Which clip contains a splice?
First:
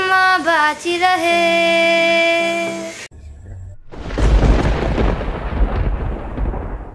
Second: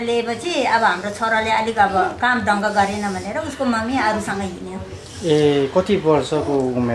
first; 1 cut; at 2.9 s

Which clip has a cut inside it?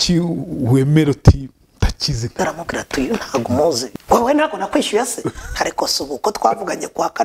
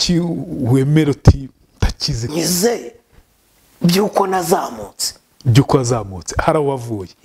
first; 2 cuts; at 2.4 s, 3.9 s

